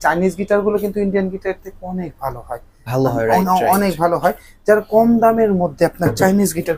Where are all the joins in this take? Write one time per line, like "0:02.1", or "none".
none